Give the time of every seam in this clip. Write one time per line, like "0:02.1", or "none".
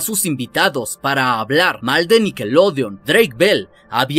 0:03.0